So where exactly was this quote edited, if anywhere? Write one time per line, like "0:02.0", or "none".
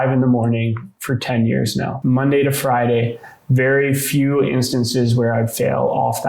0:01.9